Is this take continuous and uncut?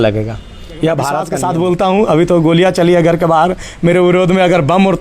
no; 1 cut; at 1.3 s

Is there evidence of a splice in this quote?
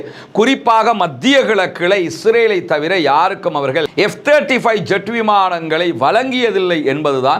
no; 0 cuts

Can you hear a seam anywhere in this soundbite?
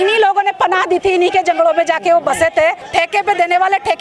yes; 1 cut; at 2.8 s

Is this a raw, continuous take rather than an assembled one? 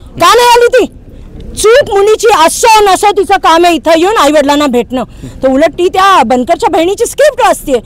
yes; 0 cuts

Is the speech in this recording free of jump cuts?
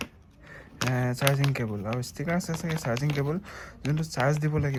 yes; 0 cuts

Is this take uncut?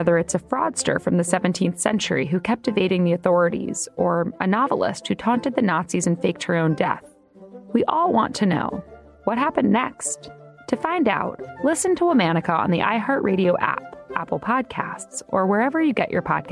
yes; 0 cuts

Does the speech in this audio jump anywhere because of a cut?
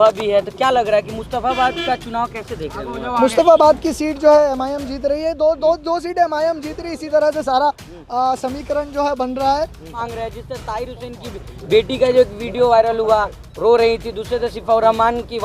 yes; 1 cut; at 9.9 s

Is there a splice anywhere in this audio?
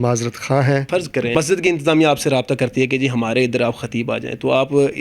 yes; 1 cut; at 1.3 s

